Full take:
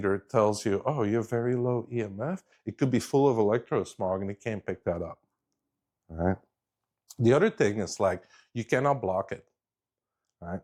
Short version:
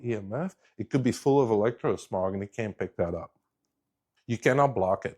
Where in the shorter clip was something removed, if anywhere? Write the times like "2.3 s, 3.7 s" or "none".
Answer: 4.1 s